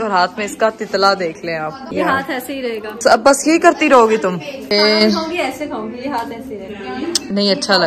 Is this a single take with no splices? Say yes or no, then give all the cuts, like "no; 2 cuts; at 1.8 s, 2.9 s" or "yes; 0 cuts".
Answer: yes; 0 cuts